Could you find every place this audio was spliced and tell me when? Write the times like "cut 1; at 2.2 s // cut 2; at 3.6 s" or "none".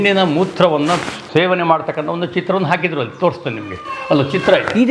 cut 1; at 1.2 s